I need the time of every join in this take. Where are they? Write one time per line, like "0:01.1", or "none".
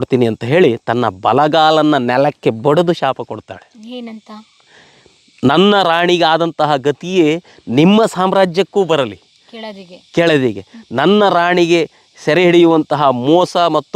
none